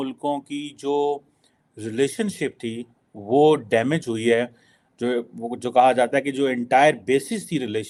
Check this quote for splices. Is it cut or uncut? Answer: uncut